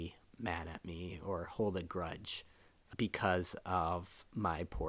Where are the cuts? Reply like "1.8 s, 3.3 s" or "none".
2.9 s